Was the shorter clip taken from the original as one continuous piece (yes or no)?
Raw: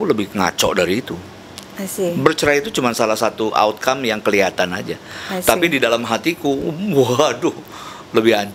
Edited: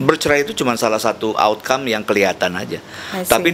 yes